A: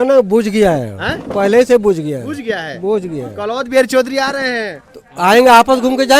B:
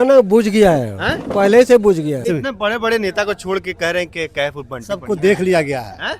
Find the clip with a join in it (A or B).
B